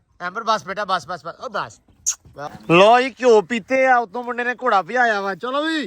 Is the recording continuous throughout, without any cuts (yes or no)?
no